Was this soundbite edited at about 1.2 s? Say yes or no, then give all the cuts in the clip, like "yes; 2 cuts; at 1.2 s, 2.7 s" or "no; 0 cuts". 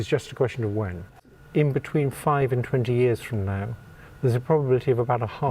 yes; 1 cut; at 1.2 s